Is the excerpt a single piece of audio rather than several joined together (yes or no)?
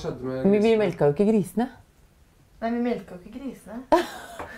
yes